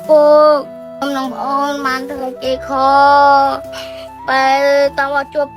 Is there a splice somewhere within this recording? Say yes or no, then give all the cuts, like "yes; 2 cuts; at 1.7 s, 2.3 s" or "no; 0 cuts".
no; 0 cuts